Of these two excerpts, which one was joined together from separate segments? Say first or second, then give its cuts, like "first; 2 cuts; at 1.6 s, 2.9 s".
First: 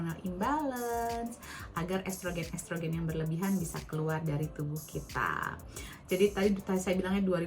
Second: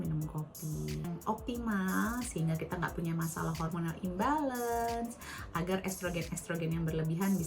second; 1 cut; at 1.1 s